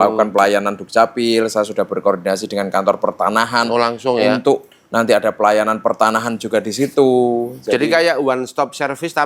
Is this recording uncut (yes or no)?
yes